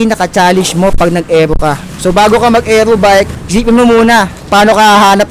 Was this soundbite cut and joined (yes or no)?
yes